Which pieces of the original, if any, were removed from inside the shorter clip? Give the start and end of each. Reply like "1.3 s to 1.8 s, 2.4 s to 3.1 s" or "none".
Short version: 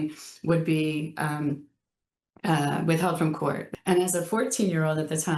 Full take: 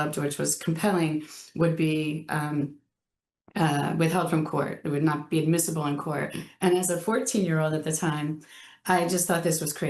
4.8 s to 6.4 s